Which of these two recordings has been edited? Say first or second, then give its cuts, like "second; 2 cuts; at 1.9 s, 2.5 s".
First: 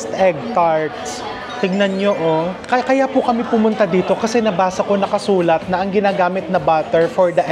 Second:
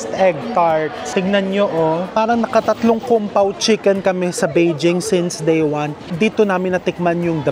second; 3 cuts; at 1.0 s, 2.1 s, 6.0 s